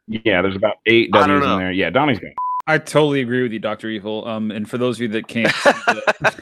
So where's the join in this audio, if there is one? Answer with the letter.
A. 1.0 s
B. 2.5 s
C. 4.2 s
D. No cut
B